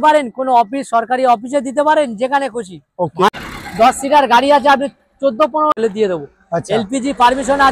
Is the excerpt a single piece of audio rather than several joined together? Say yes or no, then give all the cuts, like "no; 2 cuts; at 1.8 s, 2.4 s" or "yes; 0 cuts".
no; 2 cuts; at 3.3 s, 5.8 s